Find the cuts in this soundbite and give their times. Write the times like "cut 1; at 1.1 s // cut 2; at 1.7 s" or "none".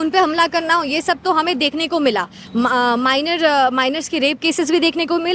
none